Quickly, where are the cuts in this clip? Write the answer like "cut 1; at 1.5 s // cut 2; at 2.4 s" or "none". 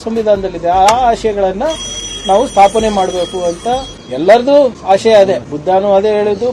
cut 1; at 4.0 s // cut 2; at 4.8 s // cut 3; at 5.5 s